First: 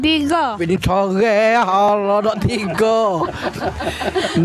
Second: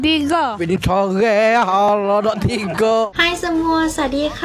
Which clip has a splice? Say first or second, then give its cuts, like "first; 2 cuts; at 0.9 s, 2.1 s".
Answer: second; 1 cut; at 3.1 s